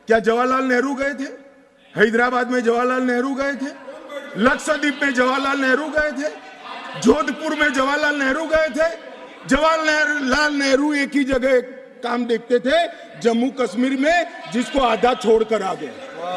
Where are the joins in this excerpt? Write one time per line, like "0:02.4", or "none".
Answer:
none